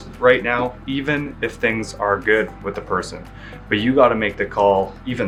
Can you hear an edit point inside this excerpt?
no; 0 cuts

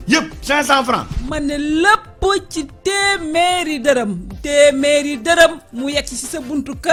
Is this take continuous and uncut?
yes; 0 cuts

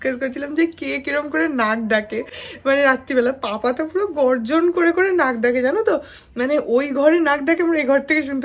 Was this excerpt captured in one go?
yes; 0 cuts

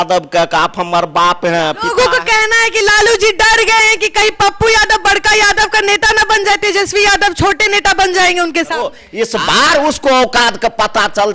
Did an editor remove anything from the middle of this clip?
yes; 2 cuts; at 1.8 s, 9.0 s

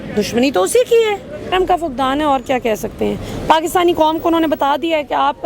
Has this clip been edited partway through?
yes; 1 cut; at 1.5 s

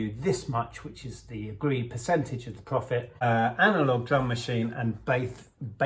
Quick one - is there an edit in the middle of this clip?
yes; 1 cut; at 3.1 s

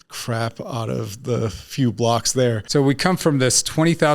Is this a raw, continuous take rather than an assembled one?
no; 1 cut; at 2.6 s

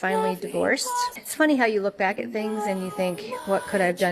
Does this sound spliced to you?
yes; 1 cut; at 1.2 s

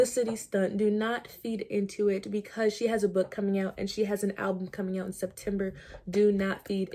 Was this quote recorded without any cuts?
yes; 0 cuts

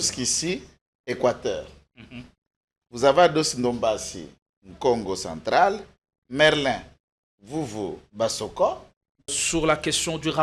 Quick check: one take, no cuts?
no; 1 cut; at 9.4 s

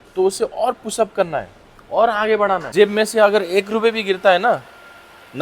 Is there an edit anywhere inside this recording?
yes; 1 cut; at 2.7 s

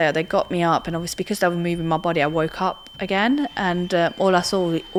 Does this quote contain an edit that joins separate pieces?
no; 0 cuts

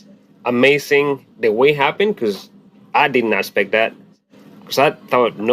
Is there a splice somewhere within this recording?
yes; 2 cuts; at 1.2 s, 4.4 s

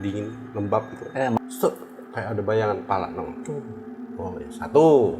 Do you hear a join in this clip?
yes; 1 cut; at 1.4 s

